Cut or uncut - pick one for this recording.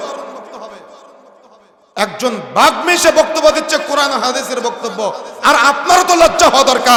uncut